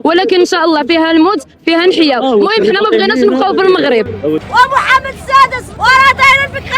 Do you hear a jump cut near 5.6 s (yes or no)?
yes